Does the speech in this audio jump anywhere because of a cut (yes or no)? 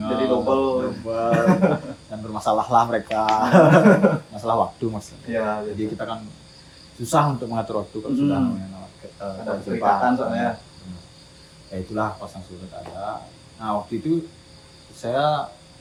no